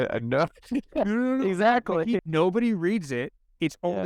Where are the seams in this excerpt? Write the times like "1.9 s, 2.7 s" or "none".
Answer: 2.2 s